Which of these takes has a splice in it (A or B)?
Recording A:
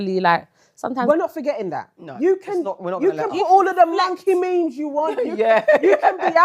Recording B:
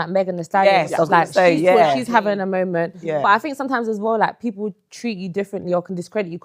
A